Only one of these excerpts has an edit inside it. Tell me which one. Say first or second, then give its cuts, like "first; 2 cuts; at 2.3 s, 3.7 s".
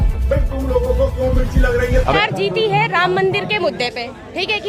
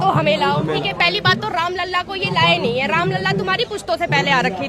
first; 1 cut; at 2.2 s